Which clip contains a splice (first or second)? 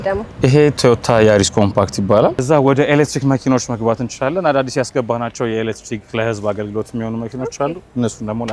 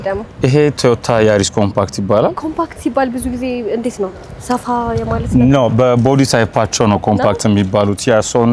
first